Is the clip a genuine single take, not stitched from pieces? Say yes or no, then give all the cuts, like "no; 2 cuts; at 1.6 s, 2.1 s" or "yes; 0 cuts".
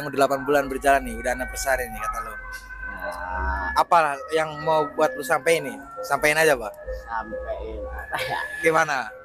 yes; 0 cuts